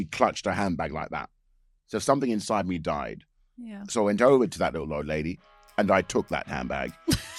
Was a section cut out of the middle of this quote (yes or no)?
no